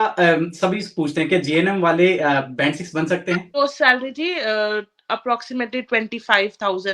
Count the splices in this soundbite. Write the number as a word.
one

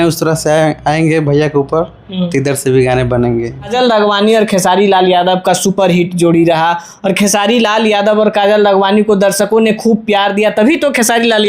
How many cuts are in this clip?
one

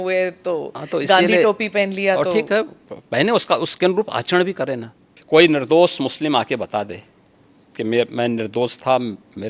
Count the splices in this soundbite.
one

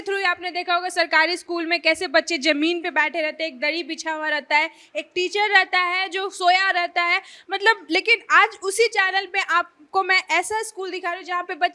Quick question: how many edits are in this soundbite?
zero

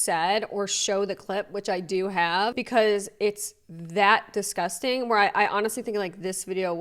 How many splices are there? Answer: one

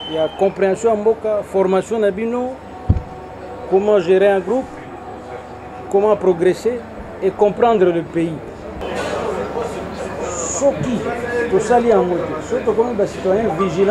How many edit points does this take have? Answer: one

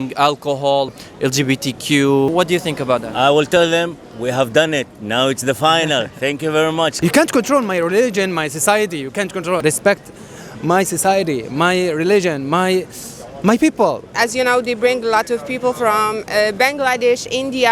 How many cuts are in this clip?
five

